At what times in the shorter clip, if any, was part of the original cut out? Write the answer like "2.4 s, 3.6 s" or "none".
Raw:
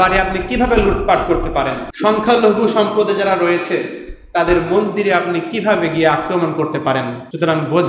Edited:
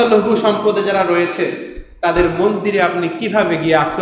none